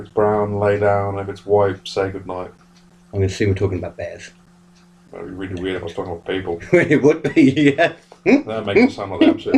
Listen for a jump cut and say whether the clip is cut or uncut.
uncut